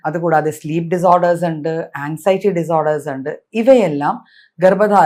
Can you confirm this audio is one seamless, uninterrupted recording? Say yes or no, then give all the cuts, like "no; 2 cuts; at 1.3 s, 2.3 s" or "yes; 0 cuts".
yes; 0 cuts